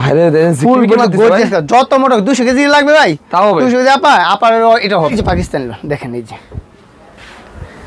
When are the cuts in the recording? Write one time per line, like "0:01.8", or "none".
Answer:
0:05.1